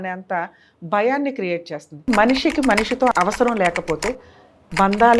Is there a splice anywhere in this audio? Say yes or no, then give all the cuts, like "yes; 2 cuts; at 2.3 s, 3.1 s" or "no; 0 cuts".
yes; 2 cuts; at 2.1 s, 3.1 s